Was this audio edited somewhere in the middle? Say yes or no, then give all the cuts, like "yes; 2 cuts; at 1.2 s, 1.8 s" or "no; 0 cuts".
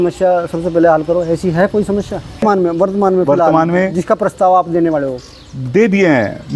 yes; 1 cut; at 2.4 s